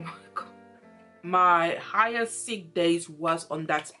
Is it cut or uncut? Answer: cut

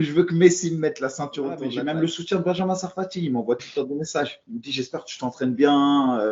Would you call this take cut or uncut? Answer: cut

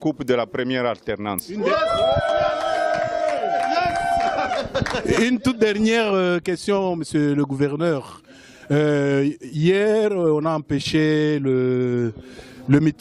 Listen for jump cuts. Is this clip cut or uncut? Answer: uncut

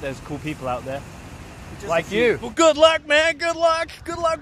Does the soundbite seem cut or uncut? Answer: cut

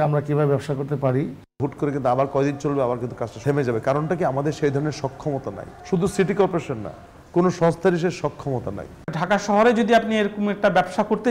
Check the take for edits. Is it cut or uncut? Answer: cut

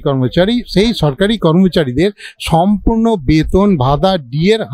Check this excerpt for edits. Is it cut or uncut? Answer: uncut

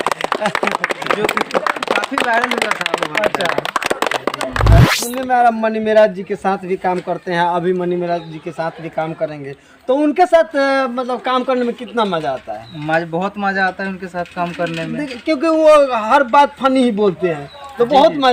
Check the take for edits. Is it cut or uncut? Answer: cut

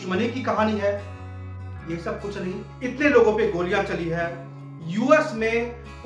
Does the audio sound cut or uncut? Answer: cut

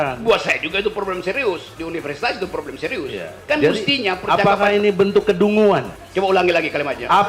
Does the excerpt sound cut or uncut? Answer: cut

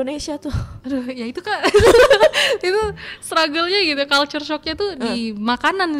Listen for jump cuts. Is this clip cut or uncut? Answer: uncut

